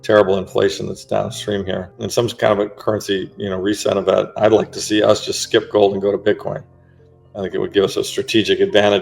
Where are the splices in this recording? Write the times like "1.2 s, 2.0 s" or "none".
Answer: 1.9 s